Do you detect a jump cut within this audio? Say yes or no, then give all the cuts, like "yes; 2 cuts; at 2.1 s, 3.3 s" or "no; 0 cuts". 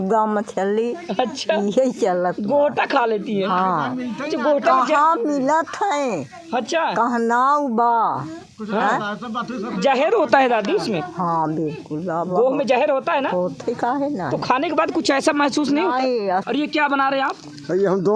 yes; 1 cut; at 16.4 s